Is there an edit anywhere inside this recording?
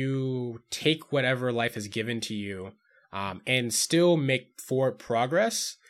no; 0 cuts

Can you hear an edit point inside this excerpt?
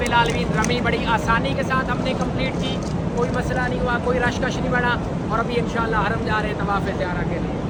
no; 0 cuts

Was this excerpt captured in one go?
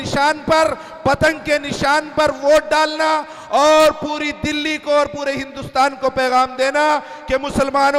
yes; 0 cuts

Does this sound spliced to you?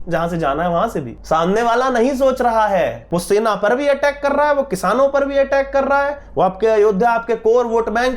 yes; 2 cuts; at 1.1 s, 3.0 s

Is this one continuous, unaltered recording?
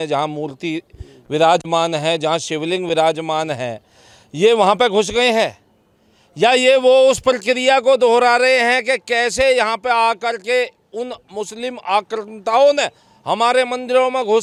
yes; 0 cuts

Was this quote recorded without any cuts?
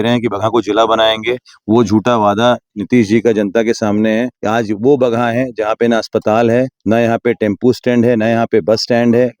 no; 1 cut; at 4.4 s

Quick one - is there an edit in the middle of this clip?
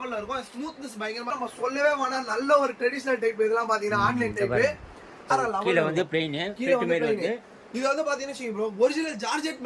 yes; 2 cuts; at 1.3 s, 5.3 s

